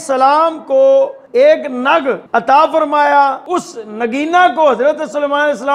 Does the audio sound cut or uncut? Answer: cut